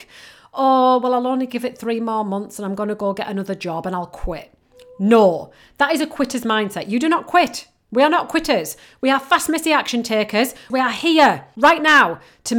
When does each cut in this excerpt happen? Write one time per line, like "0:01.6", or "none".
0:10.6
0:11.5